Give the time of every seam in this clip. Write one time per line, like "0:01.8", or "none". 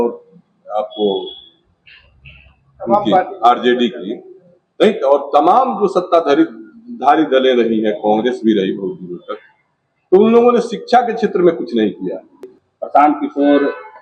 0:12.6